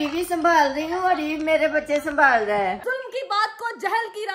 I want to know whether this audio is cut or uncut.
cut